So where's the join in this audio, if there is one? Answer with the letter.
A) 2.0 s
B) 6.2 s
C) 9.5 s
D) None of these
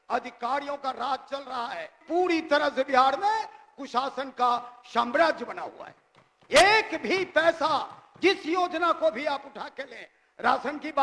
A